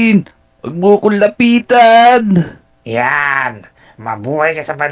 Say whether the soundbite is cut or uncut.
cut